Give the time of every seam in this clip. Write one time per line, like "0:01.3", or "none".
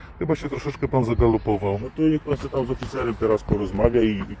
none